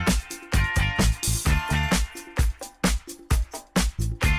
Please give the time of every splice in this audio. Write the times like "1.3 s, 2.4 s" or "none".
1.2 s